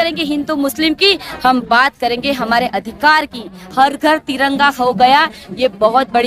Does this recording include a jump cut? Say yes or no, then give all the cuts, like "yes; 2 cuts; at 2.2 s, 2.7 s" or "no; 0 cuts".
yes; 1 cut; at 3.6 s